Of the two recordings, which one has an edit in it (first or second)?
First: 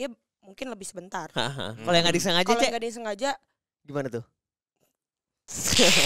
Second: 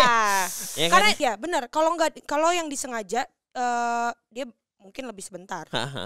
second